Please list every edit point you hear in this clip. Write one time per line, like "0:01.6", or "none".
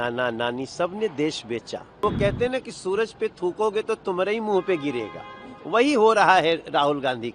0:02.0